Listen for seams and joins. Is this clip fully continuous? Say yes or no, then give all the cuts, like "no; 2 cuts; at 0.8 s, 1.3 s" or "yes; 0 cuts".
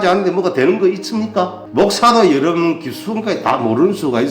no; 1 cut; at 1.6 s